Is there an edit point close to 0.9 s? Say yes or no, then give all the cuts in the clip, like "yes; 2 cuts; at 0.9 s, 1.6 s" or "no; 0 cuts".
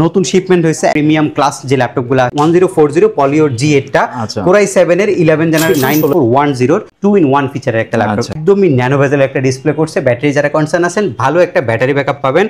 yes; 4 cuts; at 0.9 s, 2.3 s, 5.8 s, 8.3 s